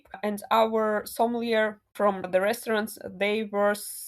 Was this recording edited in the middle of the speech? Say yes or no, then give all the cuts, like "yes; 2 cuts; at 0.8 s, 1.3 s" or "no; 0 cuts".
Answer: yes; 1 cut; at 2.3 s